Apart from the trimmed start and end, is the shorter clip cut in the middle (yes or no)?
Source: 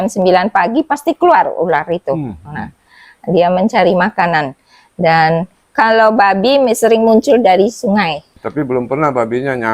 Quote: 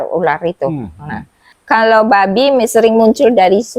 yes